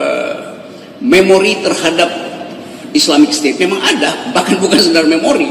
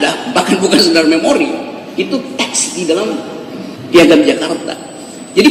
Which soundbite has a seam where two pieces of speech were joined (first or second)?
second